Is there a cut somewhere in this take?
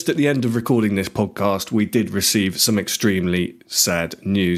no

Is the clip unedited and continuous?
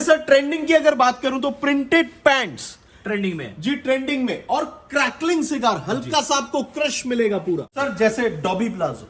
no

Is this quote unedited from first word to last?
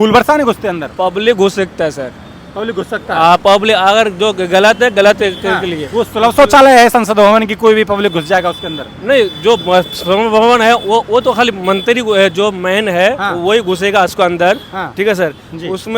yes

